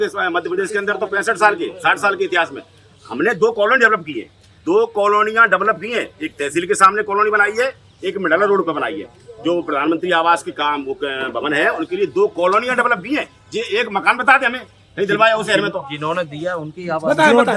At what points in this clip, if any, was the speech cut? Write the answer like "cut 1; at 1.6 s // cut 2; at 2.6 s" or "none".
none

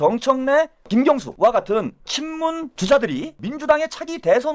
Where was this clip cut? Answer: cut 1; at 0.9 s // cut 2; at 2.7 s // cut 3; at 3.4 s

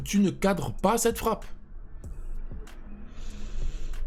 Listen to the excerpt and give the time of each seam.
none

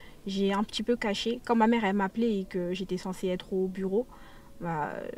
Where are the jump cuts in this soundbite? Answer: none

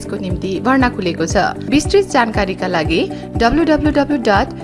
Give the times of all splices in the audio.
cut 1; at 1.6 s

